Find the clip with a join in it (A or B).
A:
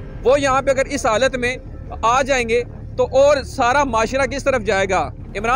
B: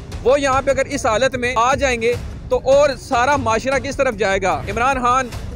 B